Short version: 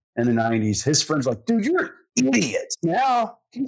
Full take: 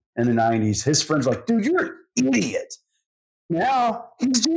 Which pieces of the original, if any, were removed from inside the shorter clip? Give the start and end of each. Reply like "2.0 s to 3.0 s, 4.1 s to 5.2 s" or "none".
2.7 s to 3.4 s

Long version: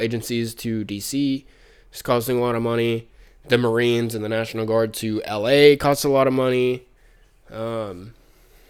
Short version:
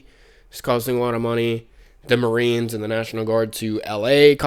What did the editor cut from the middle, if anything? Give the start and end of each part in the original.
none

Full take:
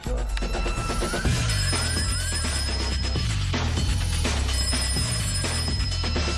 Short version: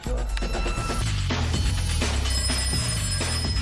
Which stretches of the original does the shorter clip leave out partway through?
1.0 s to 3.2 s

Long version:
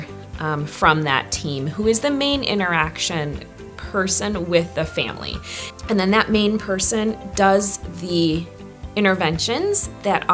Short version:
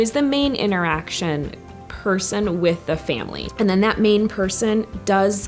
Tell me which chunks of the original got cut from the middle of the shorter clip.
5.2 s to 5.7 s

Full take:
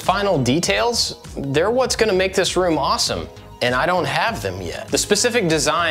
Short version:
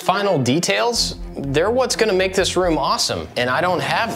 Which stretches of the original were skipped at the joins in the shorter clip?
3.2 s to 3.5 s

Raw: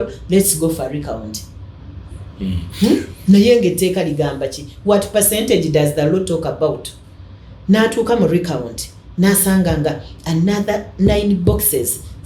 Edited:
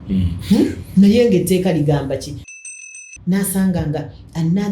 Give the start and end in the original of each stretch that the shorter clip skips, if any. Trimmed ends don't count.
4.8 s to 8.4 s

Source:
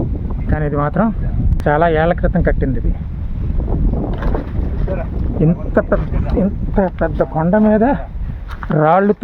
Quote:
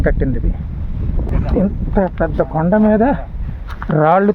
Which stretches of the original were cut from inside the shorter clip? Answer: 3.7 s to 6.1 s

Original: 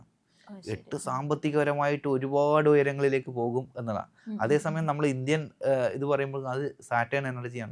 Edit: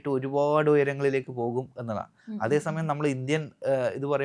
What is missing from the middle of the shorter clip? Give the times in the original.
none

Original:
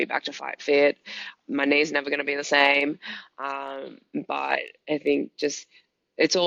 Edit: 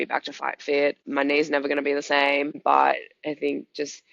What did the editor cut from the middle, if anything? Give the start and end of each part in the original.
1.0 s to 1.4 s, 3.0 s to 4.2 s

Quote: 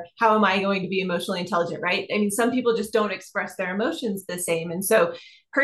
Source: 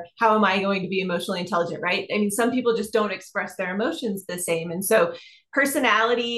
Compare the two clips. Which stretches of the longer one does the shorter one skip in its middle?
none

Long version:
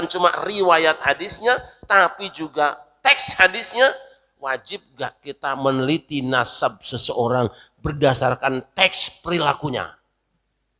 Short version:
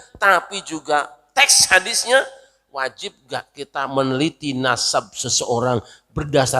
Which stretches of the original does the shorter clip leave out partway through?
none

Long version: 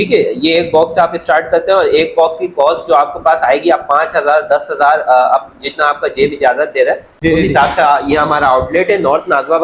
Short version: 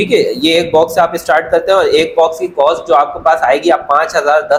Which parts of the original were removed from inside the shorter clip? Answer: none

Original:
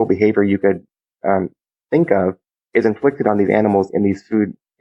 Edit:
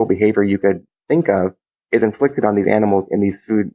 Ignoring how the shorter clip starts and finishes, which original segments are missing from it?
0.9 s to 1.7 s

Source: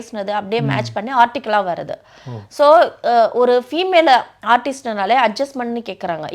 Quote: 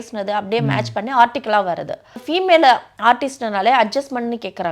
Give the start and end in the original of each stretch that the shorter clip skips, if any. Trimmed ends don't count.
2.3 s to 3.7 s

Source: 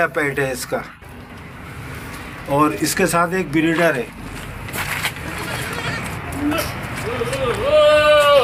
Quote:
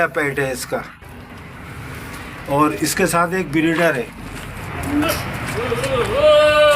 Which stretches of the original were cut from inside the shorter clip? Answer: 4.6 s to 6.1 s

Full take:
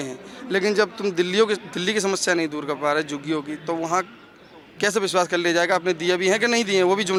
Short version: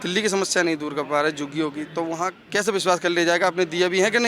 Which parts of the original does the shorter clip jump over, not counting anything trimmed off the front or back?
4.1 s to 4.7 s

